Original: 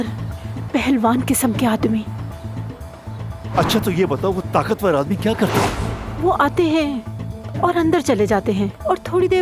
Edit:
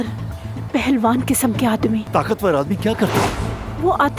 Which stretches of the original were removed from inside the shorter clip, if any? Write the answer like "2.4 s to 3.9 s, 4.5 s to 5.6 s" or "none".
2.1 s to 4.5 s